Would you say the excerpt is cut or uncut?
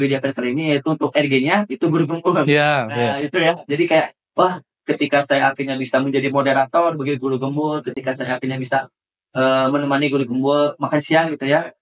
uncut